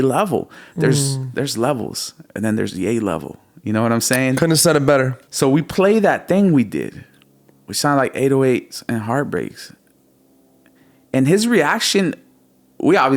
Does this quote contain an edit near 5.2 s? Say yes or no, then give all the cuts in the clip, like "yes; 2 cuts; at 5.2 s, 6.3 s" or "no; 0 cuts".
yes; 1 cut; at 5.2 s